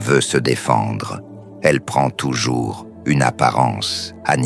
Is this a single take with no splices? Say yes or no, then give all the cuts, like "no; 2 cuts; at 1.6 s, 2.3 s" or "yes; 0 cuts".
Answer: yes; 0 cuts